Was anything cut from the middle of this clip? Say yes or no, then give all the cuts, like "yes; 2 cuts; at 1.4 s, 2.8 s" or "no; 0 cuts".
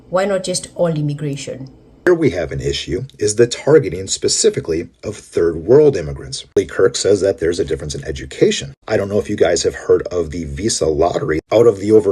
yes; 2 cuts; at 2.1 s, 6.6 s